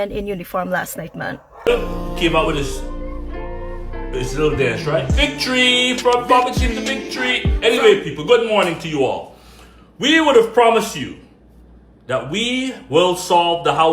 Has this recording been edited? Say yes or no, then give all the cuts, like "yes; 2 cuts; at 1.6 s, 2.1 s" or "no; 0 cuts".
yes; 1 cut; at 1.5 s